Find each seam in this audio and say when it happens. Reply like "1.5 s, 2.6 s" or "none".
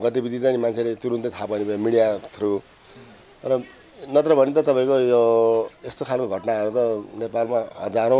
none